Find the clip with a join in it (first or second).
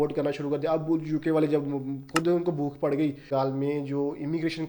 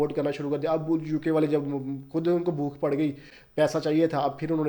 first